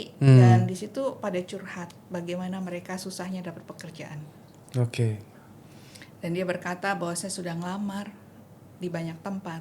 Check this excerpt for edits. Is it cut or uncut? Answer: uncut